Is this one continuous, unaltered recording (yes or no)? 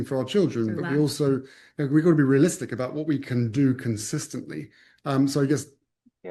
yes